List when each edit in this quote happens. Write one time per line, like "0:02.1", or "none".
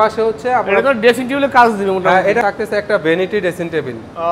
0:02.4

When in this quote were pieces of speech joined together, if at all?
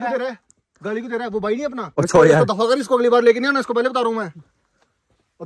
0:01.8

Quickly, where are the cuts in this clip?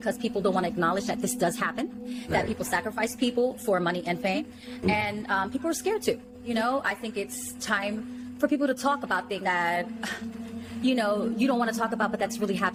none

